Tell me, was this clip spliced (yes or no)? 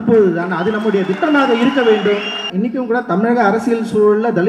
yes